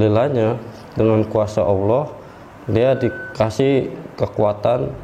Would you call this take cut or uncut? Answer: uncut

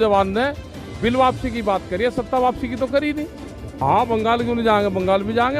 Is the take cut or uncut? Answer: cut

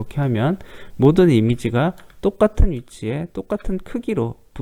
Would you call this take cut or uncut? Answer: uncut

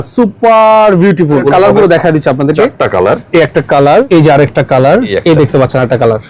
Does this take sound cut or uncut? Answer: cut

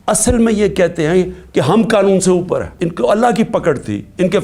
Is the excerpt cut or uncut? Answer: cut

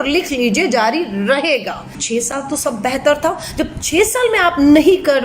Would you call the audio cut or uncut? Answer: cut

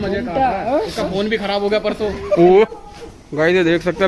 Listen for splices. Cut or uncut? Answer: cut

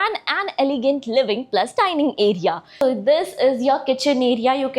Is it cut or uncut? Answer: cut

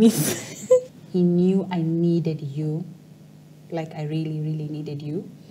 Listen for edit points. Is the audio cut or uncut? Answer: cut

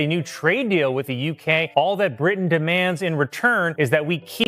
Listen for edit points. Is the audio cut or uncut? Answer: cut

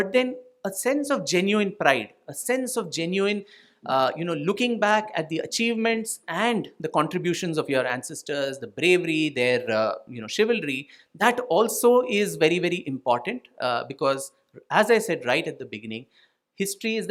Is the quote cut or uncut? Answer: uncut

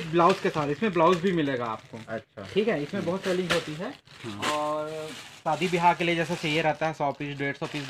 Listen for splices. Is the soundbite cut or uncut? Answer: uncut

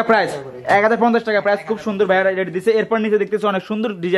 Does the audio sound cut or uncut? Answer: uncut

